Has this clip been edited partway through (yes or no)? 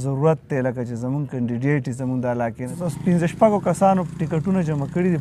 yes